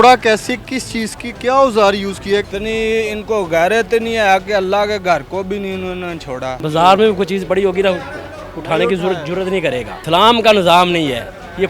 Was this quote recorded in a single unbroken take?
no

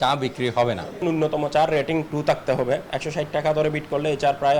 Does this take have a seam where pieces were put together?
yes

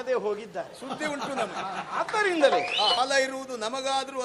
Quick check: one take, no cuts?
no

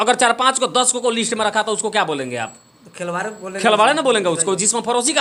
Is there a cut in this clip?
no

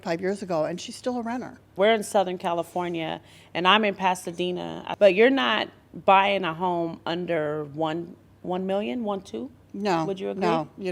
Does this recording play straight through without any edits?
no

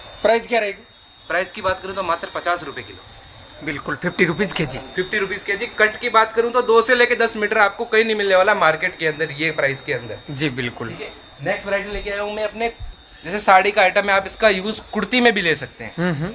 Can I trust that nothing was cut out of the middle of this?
yes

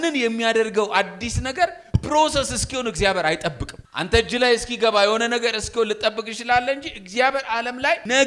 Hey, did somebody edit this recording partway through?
no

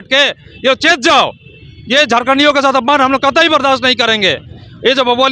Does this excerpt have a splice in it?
no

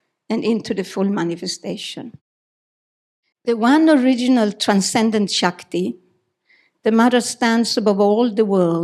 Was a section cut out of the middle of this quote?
no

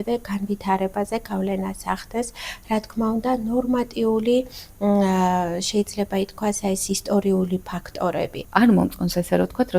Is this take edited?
yes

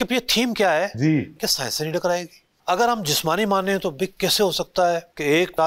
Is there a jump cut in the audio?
yes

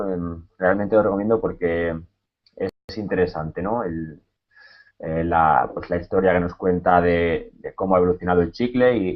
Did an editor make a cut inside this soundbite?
no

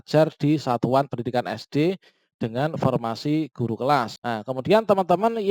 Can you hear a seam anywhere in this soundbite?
yes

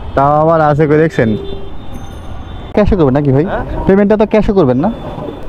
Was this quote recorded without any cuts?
no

